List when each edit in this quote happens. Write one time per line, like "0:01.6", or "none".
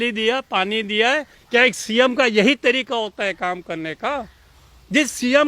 0:01.3